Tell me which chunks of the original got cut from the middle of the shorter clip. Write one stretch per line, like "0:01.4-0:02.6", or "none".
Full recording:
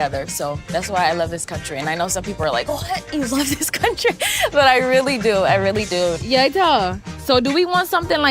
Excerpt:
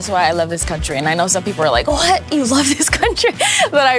none